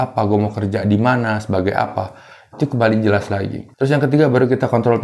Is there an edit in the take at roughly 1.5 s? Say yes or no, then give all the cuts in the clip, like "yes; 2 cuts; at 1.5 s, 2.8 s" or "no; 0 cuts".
no; 1 cut; at 3.6 s